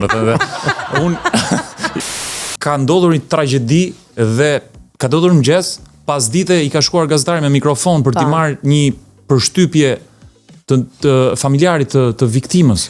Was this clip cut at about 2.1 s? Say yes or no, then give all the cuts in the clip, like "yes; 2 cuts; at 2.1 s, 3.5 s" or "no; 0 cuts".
yes; 1 cut; at 2.1 s